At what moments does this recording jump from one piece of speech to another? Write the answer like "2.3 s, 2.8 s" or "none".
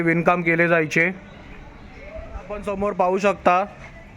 2.8 s

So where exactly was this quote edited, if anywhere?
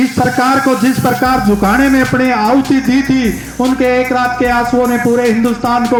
none

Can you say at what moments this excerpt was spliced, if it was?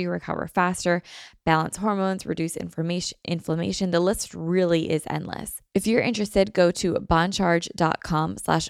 5.5 s

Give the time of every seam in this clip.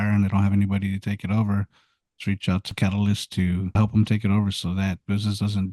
2.7 s, 3.8 s

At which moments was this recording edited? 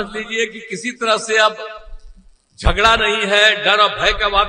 none

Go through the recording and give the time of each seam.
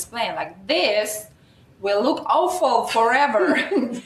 none

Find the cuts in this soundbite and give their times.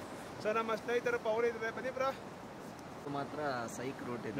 3.0 s

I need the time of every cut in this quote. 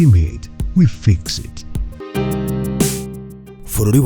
2.0 s

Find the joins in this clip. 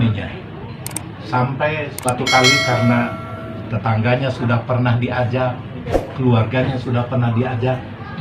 2.0 s

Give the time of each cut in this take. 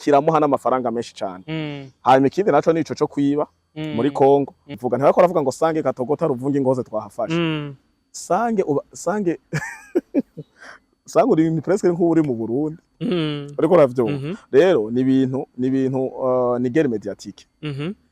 4.8 s

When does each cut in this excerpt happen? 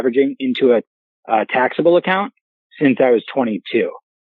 none

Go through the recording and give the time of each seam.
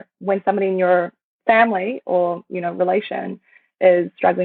none

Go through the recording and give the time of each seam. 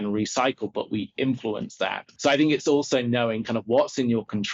2.0 s

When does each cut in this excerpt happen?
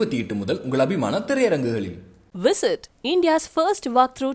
none

